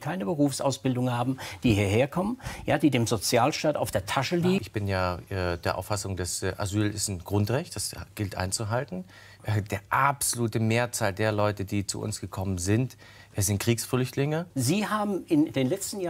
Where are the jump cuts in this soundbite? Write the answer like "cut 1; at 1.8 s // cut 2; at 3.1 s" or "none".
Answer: cut 1; at 4.6 s // cut 2; at 14.5 s